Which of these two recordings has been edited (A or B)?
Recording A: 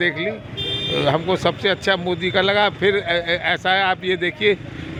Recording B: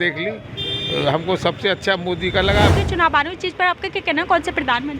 B